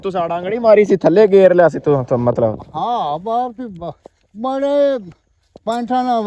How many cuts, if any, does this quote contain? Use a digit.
0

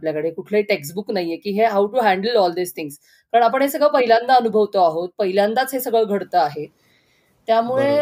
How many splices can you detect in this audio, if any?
0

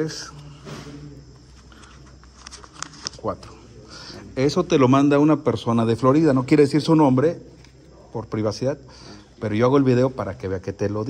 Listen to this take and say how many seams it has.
0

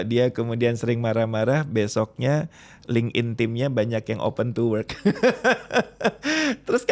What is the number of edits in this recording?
0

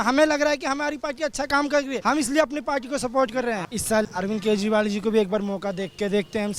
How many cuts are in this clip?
2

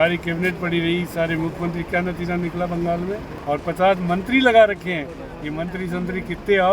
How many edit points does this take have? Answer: 1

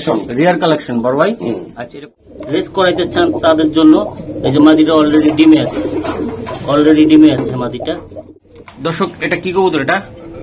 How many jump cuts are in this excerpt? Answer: 2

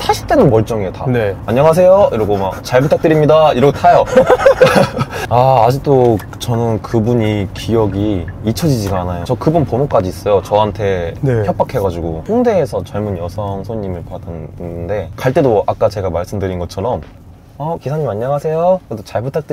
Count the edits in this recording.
4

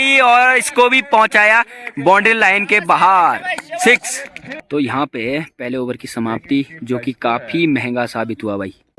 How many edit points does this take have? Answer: 0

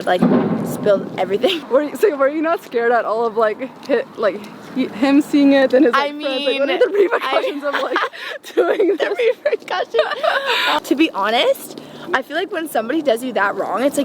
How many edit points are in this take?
2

